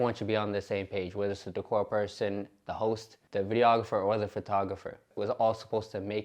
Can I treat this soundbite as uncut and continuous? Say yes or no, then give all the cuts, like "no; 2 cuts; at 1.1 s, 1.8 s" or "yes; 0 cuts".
no; 2 cuts; at 3.1 s, 5.1 s